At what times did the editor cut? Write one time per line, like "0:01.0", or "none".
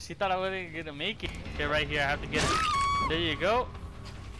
0:01.2